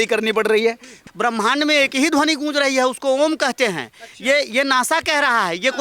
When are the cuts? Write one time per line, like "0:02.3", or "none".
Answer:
0:01.0